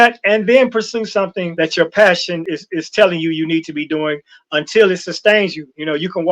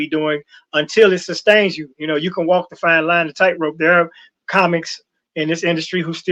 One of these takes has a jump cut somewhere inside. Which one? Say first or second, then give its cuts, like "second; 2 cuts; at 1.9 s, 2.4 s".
first; 2 cuts; at 1.4 s, 2.5 s